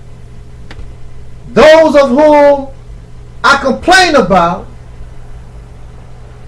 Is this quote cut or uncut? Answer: uncut